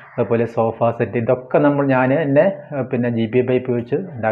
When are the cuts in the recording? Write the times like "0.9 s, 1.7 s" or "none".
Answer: none